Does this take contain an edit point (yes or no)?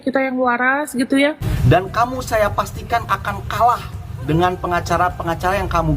yes